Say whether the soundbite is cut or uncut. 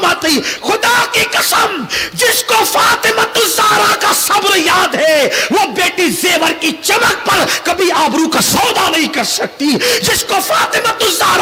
uncut